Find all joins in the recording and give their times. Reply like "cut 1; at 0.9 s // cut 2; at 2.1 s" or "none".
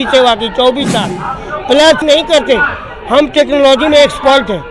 cut 1; at 2.0 s